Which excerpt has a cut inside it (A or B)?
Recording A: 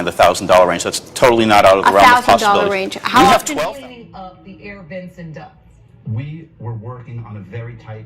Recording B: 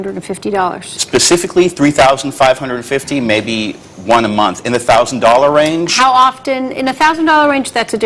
A